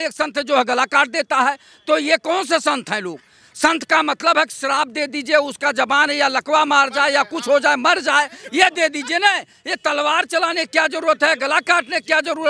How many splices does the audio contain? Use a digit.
0